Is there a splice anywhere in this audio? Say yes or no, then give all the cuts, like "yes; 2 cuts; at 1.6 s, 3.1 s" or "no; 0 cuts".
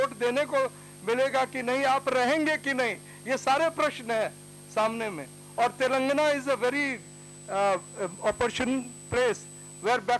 no; 0 cuts